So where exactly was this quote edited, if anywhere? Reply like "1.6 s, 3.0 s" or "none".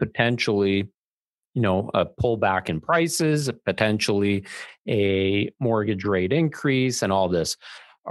none

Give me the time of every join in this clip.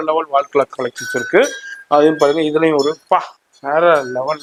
none

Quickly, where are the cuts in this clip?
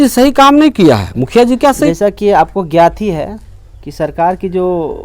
1.9 s

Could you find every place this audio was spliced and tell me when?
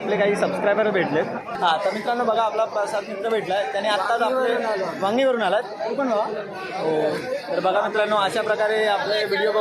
1.6 s

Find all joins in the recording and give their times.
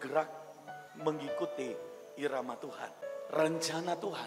3.0 s

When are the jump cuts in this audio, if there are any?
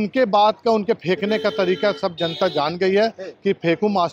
none

